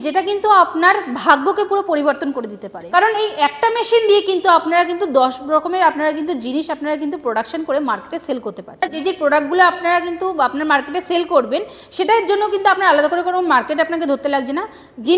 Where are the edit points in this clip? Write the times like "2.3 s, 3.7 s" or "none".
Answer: 2.7 s, 8.9 s